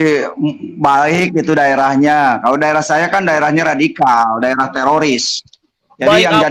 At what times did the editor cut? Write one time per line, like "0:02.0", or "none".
none